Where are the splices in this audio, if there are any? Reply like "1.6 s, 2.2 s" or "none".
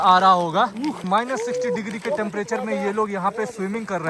1.0 s